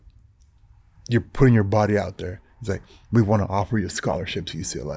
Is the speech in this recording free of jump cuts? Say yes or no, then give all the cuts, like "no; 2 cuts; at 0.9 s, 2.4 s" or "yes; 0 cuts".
yes; 0 cuts